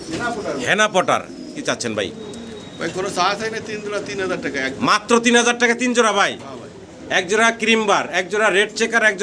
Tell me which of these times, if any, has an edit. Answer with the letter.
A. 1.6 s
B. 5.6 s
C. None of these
A